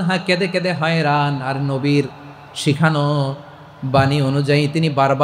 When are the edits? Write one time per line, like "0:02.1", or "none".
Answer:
none

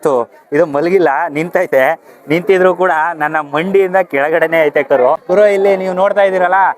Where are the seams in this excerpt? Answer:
0:05.2

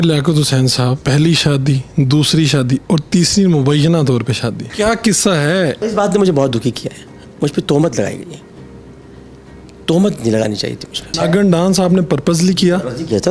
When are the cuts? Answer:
0:01.0
0:04.6
0:05.8
0:11.0

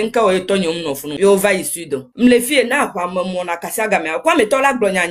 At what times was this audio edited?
0:02.1

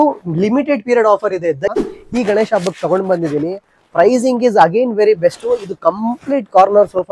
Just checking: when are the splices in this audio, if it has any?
0:01.7

